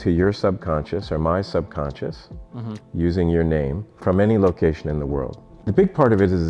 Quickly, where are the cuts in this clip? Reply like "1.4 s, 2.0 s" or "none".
5.6 s